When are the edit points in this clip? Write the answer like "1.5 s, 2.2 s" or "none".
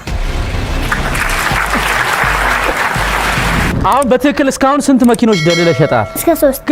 none

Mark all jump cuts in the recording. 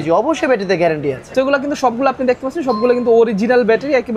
1.3 s

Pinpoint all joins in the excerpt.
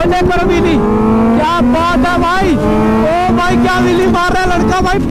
none

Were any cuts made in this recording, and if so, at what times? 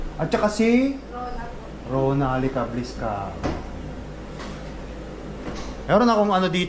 none

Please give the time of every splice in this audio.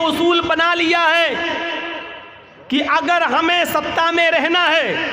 none

